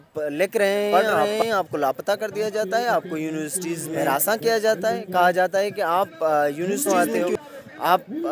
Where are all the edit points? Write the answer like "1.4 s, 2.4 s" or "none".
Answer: 0.9 s, 3.9 s, 6.9 s